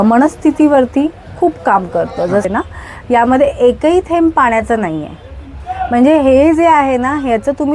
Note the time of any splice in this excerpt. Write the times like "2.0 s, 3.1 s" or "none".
2.5 s